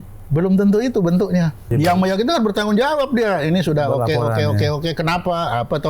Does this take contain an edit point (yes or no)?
yes